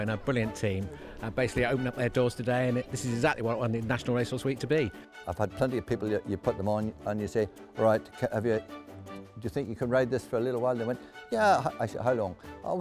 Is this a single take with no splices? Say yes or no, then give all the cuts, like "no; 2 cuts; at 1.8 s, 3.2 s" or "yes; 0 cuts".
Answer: no; 1 cut; at 5.1 s